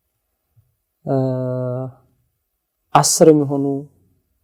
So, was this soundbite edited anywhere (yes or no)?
no